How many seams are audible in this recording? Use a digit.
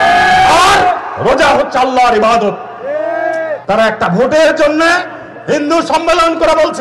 1